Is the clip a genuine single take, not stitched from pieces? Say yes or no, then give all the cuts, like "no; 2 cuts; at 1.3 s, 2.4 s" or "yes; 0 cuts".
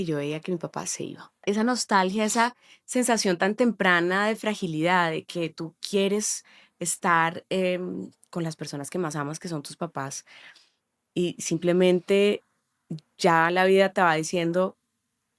no; 1 cut; at 1.4 s